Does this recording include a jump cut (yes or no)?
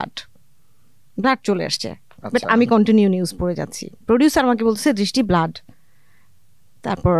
no